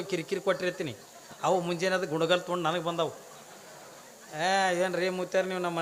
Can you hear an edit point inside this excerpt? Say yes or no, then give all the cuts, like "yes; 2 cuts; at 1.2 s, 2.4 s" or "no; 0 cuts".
no; 0 cuts